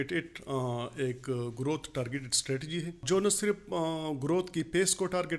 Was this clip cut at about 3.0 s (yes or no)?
yes